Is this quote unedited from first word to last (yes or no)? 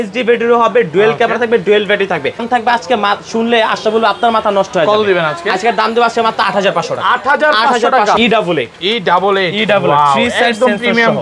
no